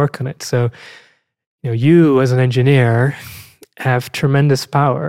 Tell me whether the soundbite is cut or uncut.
uncut